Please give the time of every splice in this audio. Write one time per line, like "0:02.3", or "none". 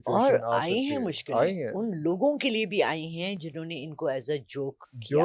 none